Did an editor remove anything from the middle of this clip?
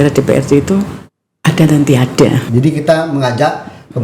yes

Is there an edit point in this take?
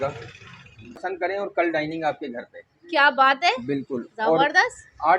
yes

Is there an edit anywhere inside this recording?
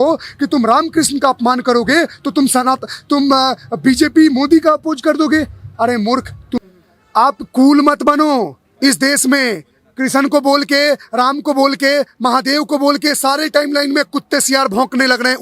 yes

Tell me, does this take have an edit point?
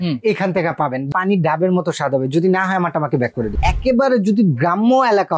yes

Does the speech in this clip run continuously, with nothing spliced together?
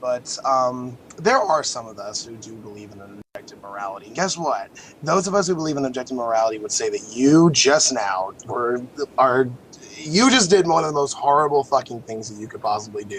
no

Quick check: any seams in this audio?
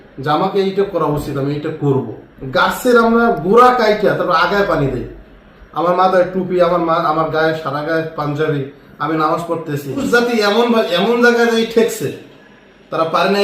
yes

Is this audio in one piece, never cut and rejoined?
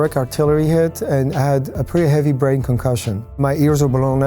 no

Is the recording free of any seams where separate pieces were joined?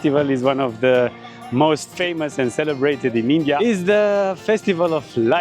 no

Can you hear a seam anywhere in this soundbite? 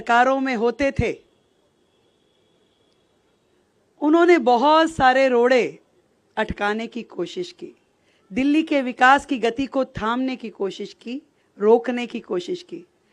no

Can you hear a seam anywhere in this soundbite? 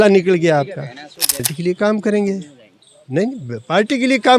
yes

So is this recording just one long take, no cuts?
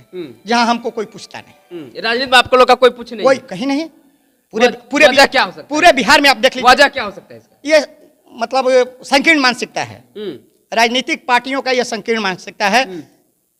yes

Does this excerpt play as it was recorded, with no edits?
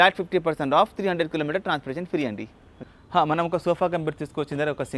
no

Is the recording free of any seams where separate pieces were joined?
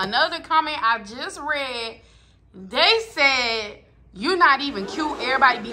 yes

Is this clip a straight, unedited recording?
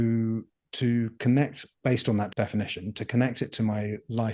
no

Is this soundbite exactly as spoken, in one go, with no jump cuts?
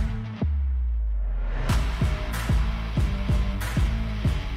yes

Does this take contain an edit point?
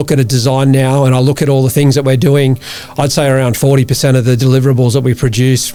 no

